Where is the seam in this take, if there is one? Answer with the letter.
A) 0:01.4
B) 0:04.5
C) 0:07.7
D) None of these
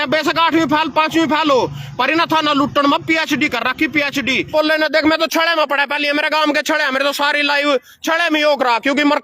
B